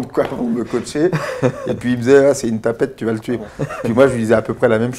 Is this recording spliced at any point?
yes; 1 cut; at 3.4 s

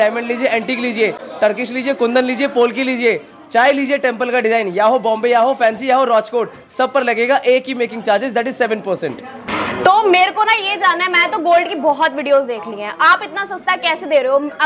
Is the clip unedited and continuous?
yes; 0 cuts

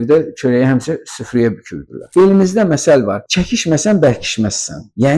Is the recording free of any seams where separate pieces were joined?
no; 1 cut; at 2.1 s

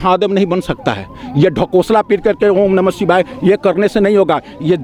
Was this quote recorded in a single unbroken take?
yes; 0 cuts

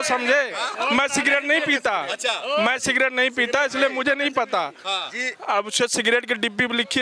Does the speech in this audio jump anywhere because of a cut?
no; 0 cuts

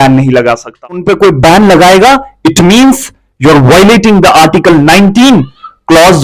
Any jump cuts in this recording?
yes; 1 cut; at 1.0 s

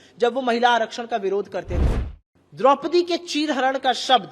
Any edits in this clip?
yes; 1 cut; at 1.9 s

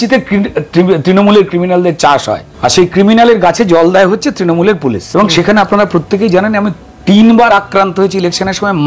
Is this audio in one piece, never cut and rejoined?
no; 2 cuts; at 2.5 s, 5.0 s

